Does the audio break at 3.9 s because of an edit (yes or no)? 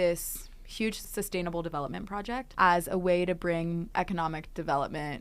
yes